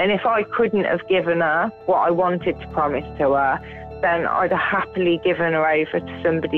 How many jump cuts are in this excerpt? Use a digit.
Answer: 1